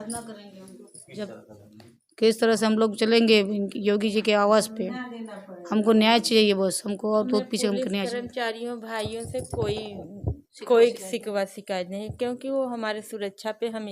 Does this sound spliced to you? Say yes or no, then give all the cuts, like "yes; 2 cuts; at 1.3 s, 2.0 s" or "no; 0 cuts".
no; 0 cuts